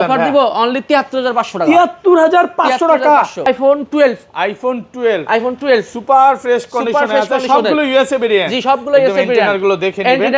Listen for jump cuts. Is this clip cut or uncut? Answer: cut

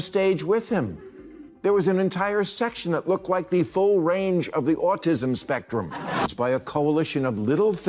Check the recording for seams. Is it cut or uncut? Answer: cut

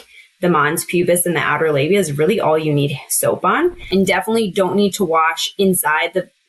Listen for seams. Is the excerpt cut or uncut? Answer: cut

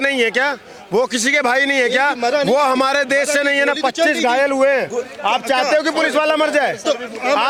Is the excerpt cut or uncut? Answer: uncut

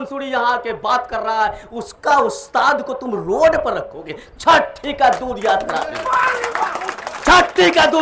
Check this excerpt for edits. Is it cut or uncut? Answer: uncut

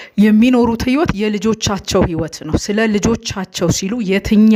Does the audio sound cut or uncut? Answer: uncut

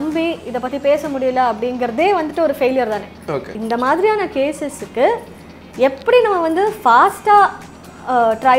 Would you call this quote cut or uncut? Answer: cut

